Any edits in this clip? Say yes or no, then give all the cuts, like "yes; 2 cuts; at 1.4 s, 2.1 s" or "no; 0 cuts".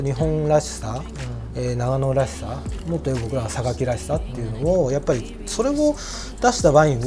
no; 0 cuts